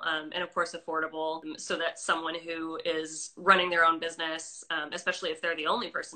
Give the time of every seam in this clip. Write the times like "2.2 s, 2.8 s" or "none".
1.5 s